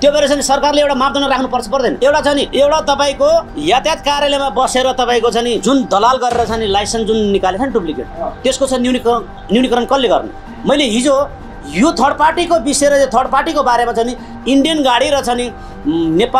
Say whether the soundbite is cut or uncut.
uncut